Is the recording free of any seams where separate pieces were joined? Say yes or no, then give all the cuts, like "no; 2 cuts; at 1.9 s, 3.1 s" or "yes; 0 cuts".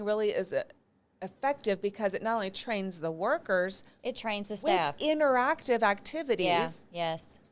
yes; 0 cuts